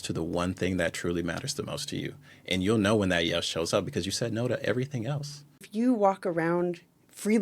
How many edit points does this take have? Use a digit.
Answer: 1